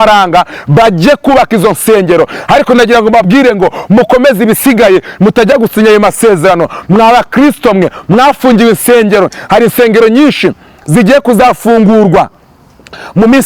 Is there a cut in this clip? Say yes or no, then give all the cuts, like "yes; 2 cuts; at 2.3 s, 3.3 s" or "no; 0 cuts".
no; 0 cuts